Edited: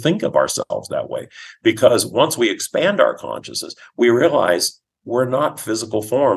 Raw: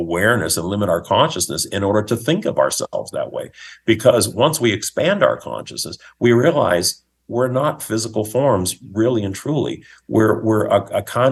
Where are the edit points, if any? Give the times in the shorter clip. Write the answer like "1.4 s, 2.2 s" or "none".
none